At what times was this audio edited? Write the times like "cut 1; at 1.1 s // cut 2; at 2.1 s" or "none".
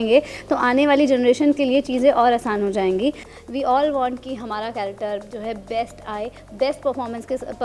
cut 1; at 3.3 s // cut 2; at 6.4 s